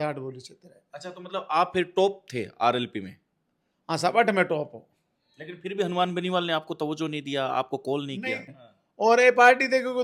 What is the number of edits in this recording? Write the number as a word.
one